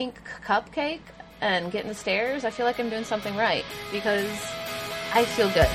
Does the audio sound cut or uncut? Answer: uncut